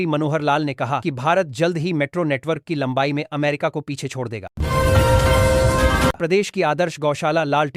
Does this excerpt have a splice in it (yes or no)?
yes